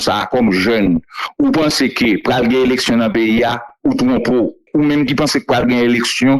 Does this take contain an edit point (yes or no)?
yes